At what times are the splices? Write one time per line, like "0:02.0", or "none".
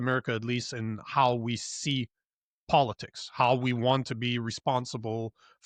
none